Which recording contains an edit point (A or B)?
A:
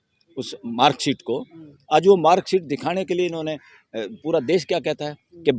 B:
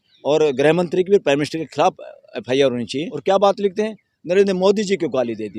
B